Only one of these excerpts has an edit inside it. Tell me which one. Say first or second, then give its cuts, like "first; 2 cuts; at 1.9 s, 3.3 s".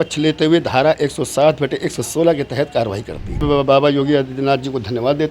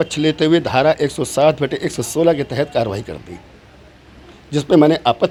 first; 1 cut; at 3.4 s